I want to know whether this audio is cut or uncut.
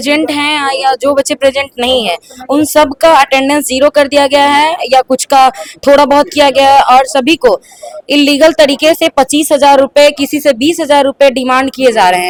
uncut